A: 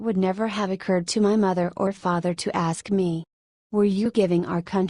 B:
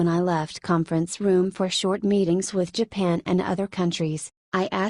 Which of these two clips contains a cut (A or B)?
A